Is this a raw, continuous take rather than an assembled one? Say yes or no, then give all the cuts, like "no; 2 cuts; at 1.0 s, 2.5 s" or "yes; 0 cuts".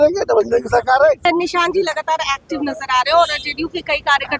no; 1 cut; at 1.2 s